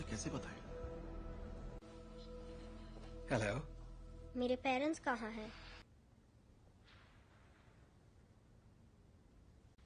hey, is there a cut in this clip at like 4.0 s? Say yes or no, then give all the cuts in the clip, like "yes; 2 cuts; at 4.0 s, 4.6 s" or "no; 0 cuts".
no; 1 cut; at 5.9 s